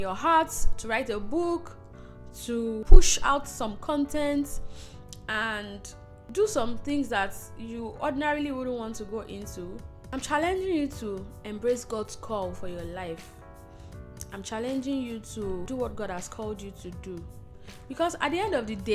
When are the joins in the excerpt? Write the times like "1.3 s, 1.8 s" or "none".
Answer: 2.8 s, 6.3 s, 9.9 s, 15.6 s

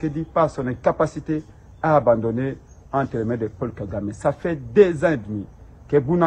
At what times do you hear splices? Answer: none

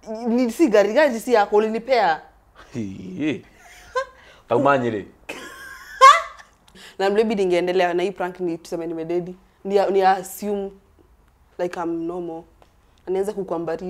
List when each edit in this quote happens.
6.8 s, 9.4 s

